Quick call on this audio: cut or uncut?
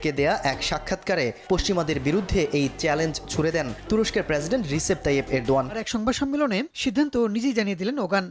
cut